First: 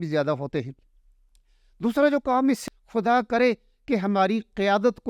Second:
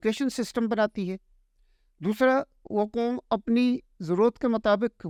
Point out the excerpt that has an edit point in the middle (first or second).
first